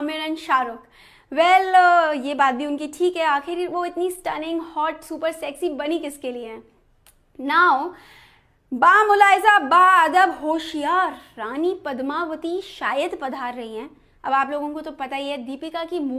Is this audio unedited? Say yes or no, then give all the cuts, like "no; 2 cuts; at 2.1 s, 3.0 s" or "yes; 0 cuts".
no; 1 cut; at 5.0 s